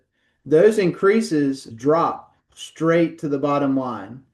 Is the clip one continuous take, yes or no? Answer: no